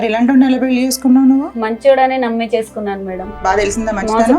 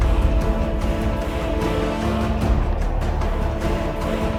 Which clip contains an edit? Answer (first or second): first